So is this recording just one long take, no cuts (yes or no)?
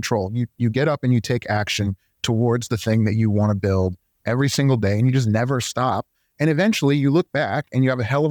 yes